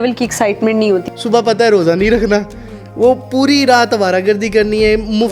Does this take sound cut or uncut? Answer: cut